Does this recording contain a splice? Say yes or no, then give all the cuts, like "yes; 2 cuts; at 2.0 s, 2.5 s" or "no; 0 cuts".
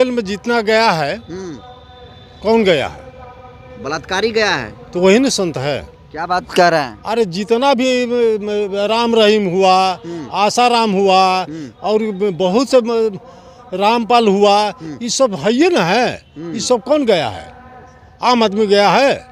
no; 0 cuts